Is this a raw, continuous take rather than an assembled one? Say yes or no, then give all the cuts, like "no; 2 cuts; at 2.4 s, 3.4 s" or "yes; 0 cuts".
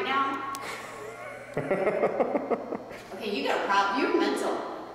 yes; 0 cuts